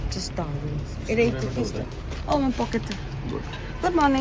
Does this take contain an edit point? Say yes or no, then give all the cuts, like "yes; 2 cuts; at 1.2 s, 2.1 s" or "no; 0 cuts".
no; 0 cuts